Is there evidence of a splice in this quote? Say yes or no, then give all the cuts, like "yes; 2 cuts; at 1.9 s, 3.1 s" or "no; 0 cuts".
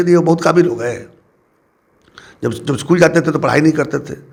no; 0 cuts